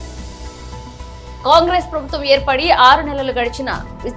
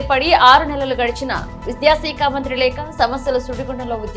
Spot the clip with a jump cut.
first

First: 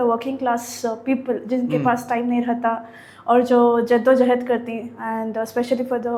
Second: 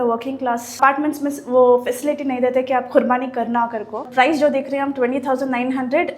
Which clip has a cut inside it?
second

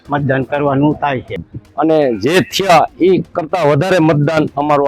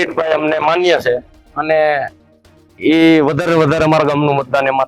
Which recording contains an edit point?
first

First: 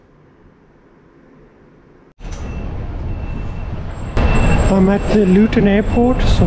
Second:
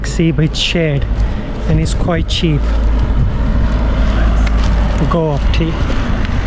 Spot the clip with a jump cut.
first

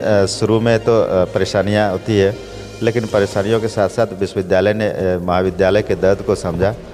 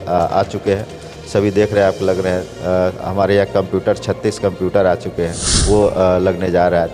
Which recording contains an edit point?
second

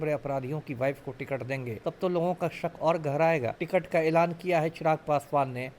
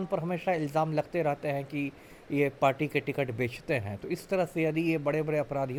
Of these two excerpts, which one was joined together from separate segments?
first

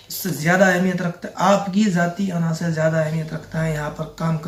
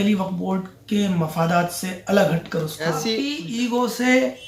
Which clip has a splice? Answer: second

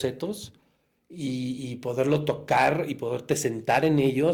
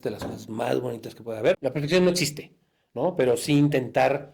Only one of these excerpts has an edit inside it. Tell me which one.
second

